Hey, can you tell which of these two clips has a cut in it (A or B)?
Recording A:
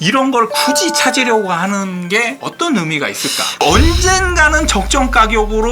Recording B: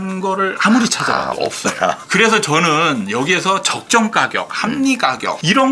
A